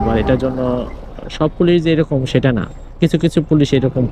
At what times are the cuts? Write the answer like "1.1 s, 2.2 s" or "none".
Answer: none